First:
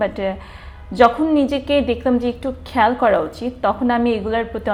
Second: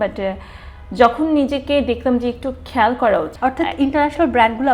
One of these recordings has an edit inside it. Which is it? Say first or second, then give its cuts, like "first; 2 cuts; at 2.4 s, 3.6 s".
second; 1 cut; at 3.3 s